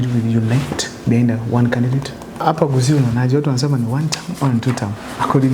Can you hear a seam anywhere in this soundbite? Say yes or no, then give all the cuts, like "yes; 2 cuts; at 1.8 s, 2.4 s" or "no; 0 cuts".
yes; 1 cut; at 2.4 s